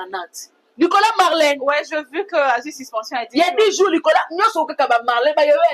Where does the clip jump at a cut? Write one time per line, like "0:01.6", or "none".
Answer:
none